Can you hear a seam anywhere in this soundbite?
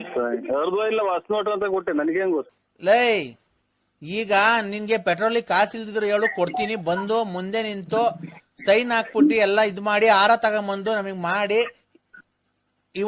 yes; 1 cut; at 2.5 s

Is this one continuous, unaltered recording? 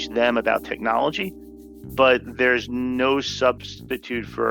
yes; 0 cuts

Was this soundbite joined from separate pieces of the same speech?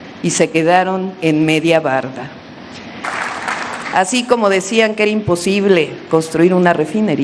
yes; 1 cut; at 3.0 s

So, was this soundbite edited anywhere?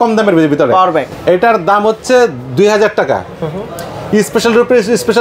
no; 0 cuts

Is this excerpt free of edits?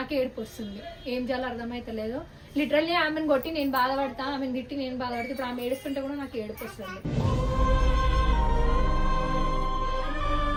yes; 0 cuts

